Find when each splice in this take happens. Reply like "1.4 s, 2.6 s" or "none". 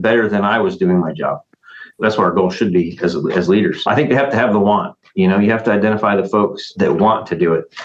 2.0 s, 3.9 s, 6.7 s